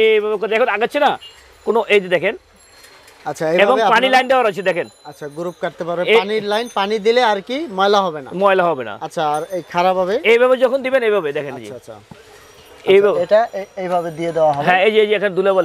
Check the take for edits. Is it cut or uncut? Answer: uncut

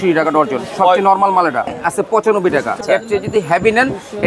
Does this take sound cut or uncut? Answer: cut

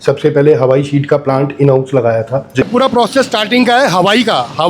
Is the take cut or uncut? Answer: cut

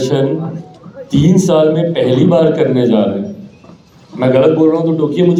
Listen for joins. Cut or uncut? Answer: uncut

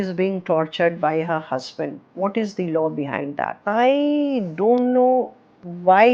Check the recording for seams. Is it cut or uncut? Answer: cut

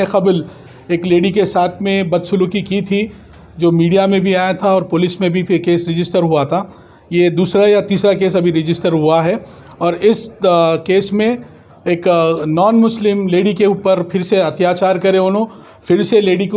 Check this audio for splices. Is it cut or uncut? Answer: uncut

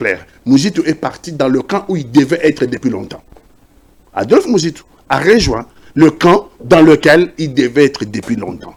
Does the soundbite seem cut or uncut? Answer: uncut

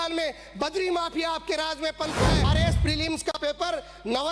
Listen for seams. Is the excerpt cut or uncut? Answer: cut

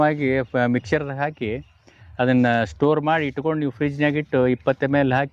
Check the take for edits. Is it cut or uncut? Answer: uncut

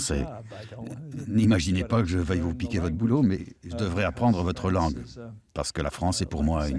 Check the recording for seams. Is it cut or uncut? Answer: uncut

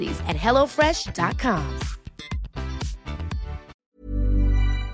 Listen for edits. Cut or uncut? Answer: cut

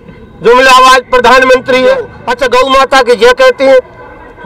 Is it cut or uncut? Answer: cut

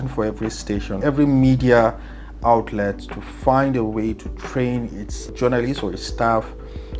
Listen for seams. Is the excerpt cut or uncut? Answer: cut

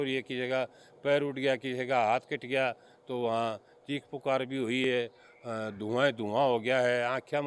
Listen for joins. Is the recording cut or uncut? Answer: uncut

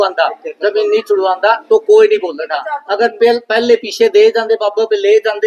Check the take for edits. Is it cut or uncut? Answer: uncut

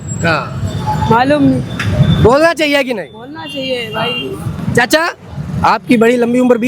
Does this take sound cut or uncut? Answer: uncut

